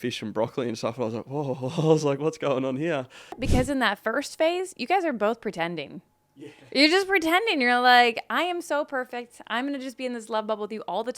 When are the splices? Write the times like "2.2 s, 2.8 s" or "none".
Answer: 3.4 s